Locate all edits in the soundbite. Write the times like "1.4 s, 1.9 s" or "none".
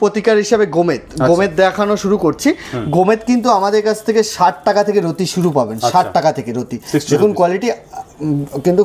none